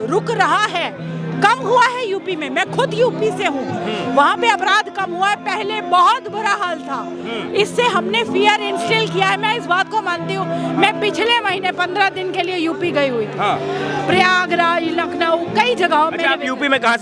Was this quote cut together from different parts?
no; 0 cuts

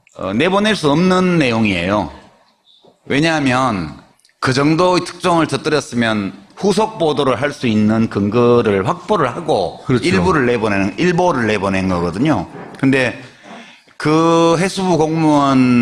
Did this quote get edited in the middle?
no; 0 cuts

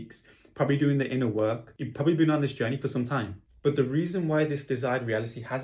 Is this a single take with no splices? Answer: yes; 0 cuts

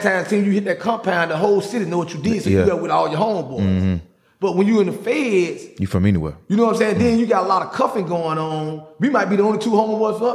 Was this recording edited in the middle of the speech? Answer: no; 0 cuts

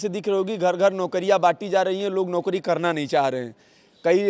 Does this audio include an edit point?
no; 0 cuts

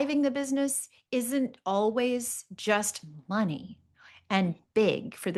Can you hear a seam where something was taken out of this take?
no; 0 cuts

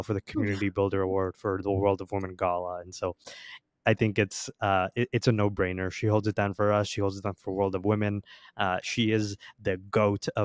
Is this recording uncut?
yes; 0 cuts

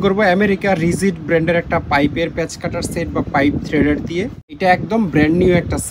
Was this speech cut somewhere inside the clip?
yes; 1 cut; at 4.4 s

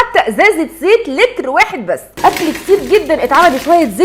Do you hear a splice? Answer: yes; 1 cut; at 2.1 s

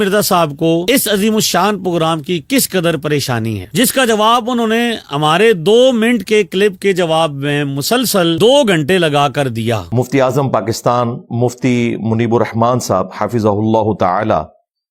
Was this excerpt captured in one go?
yes; 0 cuts

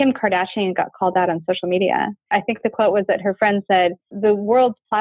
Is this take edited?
yes; 2 cuts; at 2.3 s, 4.1 s

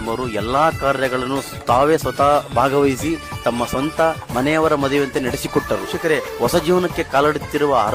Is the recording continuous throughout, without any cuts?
yes; 0 cuts

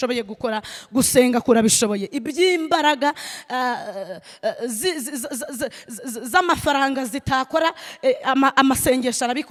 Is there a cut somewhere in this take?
no; 0 cuts

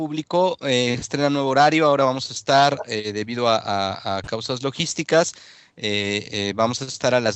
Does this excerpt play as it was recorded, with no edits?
no; 1 cut; at 2.6 s

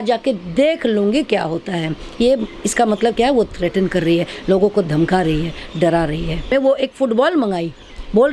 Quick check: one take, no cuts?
no; 1 cut; at 6.5 s

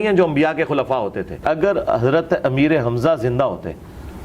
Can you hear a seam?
yes; 1 cut; at 1.4 s

